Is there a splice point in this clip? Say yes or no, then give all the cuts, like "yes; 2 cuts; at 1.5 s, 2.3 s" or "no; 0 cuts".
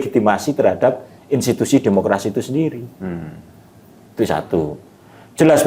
no; 0 cuts